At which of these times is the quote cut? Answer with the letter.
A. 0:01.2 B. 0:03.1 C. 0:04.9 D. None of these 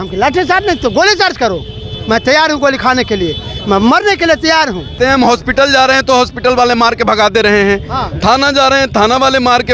C